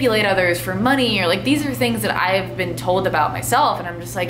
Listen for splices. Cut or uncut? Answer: uncut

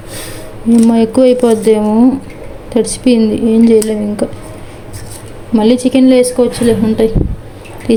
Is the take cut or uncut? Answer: uncut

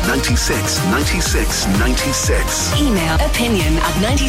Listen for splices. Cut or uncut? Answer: cut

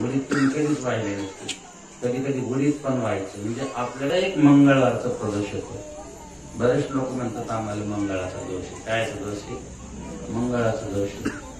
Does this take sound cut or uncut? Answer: cut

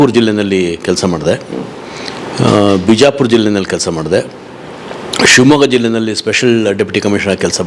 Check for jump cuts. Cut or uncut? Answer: uncut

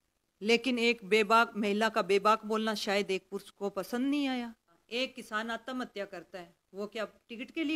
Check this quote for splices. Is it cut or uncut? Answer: cut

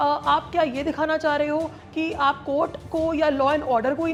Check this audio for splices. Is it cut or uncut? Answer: uncut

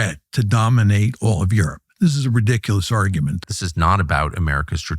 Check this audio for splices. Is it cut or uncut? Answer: cut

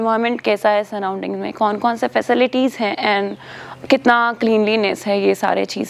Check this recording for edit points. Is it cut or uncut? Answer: uncut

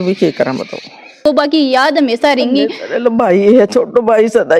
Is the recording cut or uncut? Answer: cut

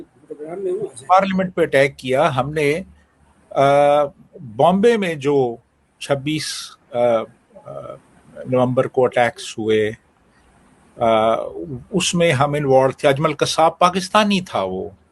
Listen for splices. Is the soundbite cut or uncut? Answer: uncut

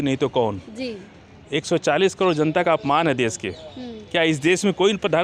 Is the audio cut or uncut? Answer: uncut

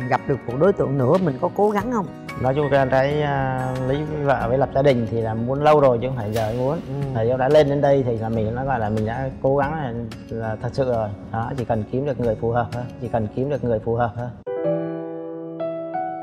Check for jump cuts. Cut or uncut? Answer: uncut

